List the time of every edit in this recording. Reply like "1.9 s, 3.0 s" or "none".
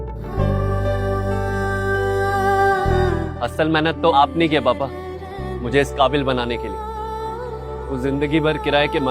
3.0 s